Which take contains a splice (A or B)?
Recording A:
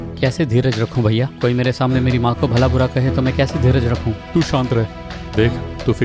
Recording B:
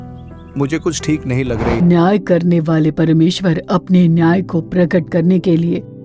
B